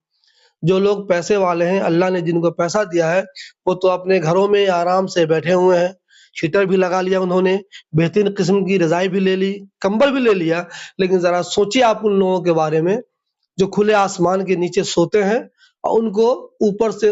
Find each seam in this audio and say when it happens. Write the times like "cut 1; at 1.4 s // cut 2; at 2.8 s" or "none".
none